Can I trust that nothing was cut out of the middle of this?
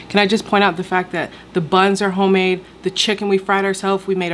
yes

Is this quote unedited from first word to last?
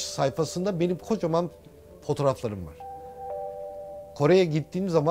yes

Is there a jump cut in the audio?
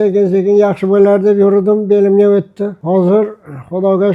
yes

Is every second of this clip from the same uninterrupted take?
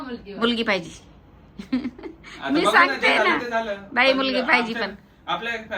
yes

